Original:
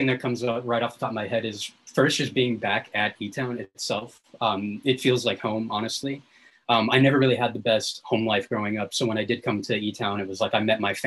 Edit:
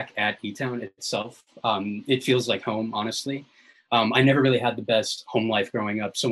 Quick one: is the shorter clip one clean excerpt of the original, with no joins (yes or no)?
yes